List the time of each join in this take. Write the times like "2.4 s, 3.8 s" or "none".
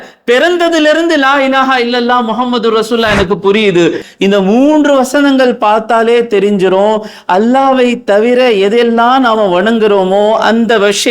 4.0 s